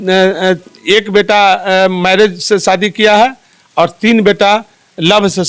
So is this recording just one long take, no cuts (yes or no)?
yes